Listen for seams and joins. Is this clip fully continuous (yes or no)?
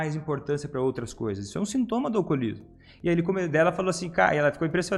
yes